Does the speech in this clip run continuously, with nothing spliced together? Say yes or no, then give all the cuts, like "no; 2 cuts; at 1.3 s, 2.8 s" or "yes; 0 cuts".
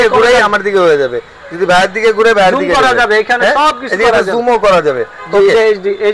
yes; 0 cuts